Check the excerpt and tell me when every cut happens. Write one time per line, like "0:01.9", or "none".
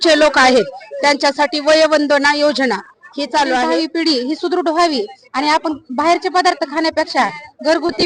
0:03.7